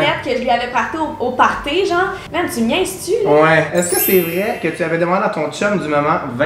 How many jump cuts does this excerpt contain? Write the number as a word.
two